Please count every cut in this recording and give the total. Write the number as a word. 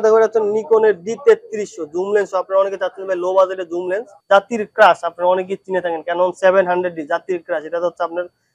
one